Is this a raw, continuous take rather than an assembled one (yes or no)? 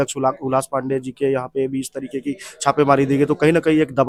yes